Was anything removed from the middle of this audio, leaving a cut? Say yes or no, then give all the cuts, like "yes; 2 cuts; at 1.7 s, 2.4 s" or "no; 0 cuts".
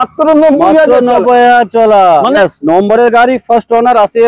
yes; 1 cut; at 2.4 s